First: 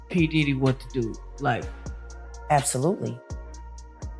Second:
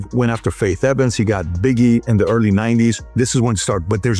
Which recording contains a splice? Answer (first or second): first